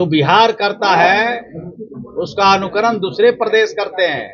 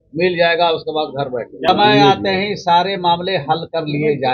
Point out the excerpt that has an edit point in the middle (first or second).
second